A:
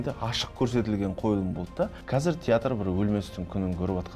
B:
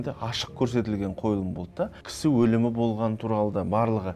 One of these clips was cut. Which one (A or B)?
A